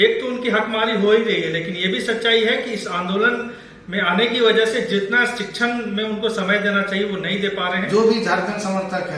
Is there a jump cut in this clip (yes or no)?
yes